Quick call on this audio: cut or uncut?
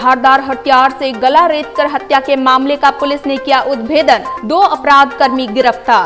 uncut